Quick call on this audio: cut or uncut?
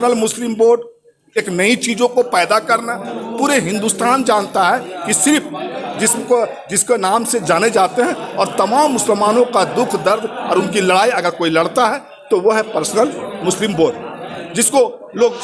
uncut